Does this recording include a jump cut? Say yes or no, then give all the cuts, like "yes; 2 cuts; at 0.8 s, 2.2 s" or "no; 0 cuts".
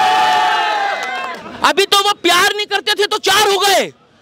yes; 1 cut; at 1.3 s